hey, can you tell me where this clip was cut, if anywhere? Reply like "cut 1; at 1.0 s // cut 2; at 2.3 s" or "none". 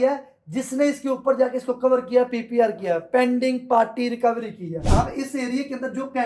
cut 1; at 4.9 s